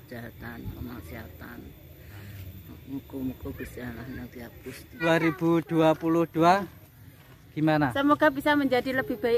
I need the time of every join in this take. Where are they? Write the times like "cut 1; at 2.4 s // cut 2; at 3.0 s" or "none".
cut 1; at 5.0 s